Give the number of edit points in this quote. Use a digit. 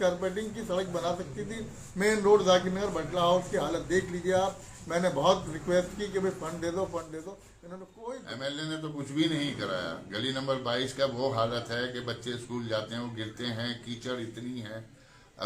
1